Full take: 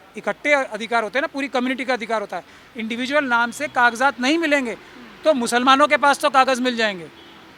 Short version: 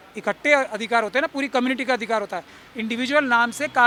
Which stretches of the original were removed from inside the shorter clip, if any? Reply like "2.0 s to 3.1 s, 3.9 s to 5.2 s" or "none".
none